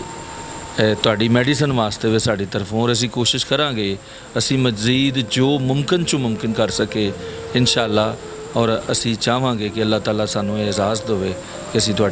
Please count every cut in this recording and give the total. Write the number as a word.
zero